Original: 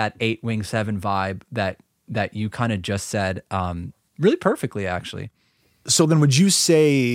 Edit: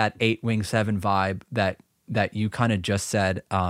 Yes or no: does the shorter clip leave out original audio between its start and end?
no